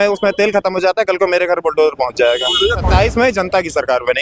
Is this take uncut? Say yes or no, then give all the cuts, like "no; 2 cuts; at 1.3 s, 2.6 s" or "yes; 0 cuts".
no; 1 cut; at 2.8 s